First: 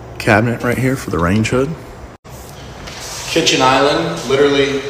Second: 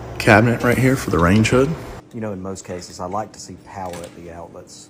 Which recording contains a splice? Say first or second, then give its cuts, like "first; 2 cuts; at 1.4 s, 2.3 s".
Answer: second; 1 cut; at 2.0 s